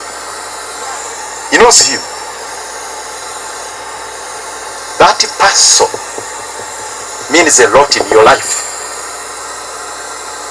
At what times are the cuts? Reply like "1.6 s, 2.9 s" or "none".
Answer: none